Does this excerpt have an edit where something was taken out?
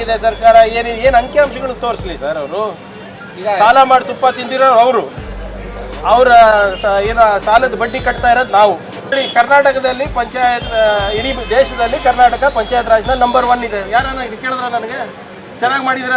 yes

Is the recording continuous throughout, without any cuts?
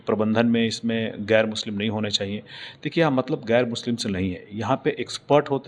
yes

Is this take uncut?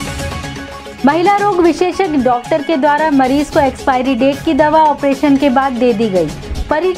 no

